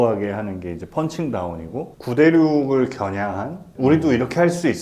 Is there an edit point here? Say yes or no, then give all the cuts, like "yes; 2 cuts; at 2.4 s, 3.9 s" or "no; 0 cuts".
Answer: yes; 1 cut; at 1.9 s